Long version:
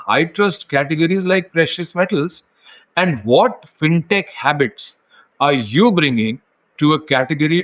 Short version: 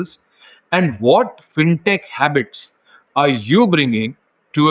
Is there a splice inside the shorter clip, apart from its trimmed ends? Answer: no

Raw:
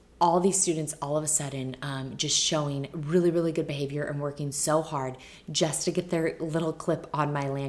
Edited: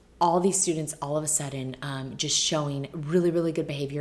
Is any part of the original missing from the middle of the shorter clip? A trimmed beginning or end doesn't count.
no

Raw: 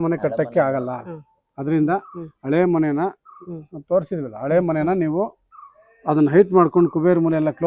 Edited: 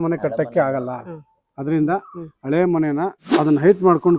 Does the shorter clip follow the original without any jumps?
no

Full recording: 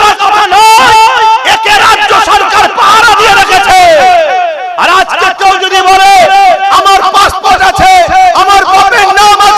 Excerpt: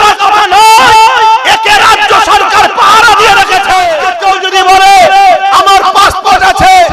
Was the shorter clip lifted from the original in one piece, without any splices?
no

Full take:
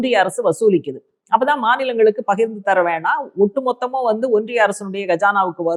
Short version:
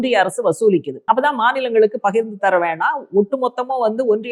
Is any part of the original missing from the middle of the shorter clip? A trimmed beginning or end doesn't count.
yes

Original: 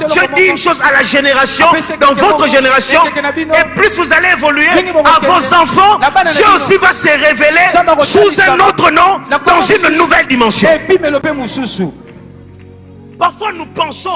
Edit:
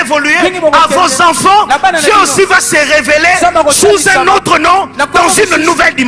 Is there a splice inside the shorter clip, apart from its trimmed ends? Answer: no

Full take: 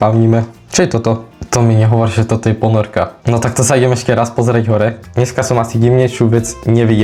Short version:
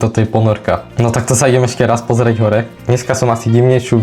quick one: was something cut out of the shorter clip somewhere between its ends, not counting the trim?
no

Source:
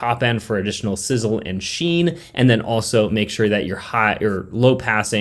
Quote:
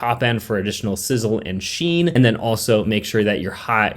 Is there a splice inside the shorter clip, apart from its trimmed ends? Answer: yes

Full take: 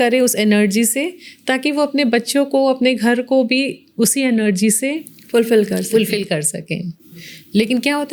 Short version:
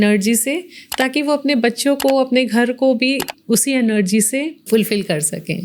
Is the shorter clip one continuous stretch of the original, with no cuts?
no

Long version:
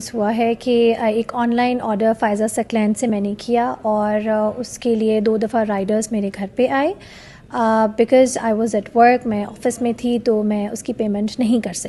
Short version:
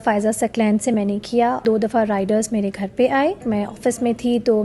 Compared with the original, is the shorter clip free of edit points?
no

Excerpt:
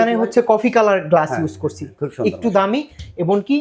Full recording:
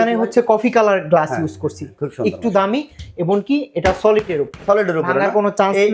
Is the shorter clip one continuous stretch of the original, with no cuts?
yes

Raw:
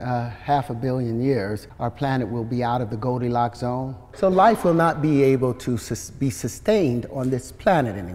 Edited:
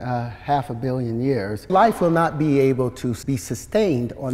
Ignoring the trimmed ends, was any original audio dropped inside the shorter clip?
yes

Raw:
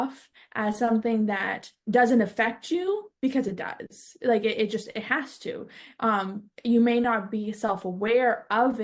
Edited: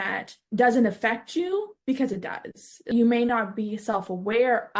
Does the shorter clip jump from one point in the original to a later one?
yes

